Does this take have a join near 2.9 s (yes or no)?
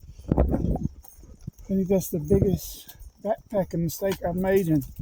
no